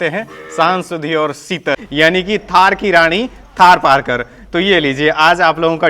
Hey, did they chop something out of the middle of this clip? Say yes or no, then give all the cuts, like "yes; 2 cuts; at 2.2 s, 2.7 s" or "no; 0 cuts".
yes; 1 cut; at 1.8 s